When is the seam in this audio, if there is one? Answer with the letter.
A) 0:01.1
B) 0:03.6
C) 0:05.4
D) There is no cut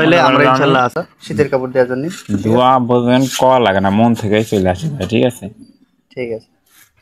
A